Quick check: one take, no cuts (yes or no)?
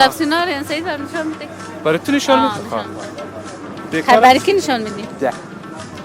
yes